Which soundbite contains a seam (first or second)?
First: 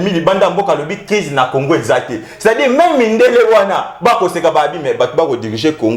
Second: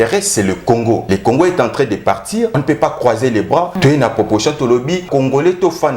second